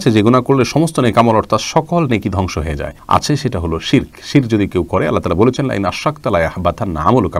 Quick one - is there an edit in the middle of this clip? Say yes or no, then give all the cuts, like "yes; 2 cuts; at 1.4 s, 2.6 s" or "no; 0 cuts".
no; 0 cuts